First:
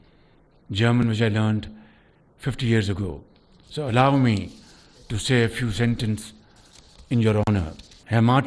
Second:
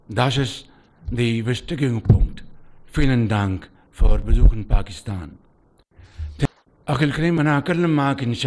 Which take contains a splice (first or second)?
second